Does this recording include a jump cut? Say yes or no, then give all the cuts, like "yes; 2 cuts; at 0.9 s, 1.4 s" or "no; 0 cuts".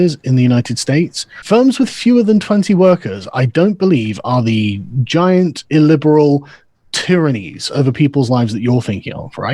yes; 1 cut; at 1.3 s